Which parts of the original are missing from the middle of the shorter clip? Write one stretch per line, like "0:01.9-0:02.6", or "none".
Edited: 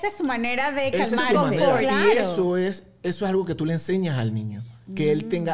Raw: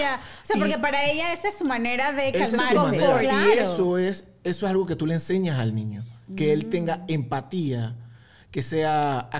none